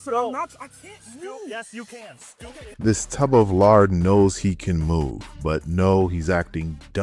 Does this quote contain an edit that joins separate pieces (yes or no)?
yes